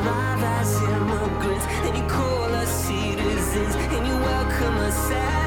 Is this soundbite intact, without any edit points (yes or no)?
yes